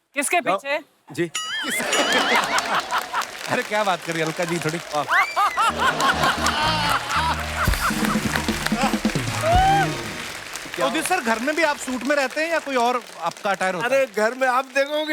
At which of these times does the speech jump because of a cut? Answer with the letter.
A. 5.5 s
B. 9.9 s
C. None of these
C